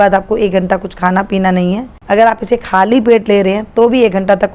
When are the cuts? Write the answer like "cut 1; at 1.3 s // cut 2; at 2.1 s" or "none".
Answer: none